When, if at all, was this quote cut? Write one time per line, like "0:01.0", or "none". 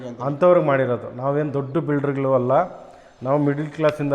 none